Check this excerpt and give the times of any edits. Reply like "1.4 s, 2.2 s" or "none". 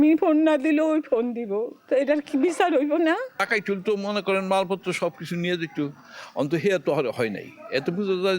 1.8 s, 3.4 s